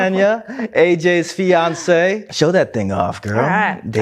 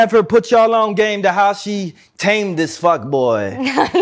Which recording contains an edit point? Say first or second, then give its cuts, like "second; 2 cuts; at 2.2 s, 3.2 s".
first; 1 cut; at 2.3 s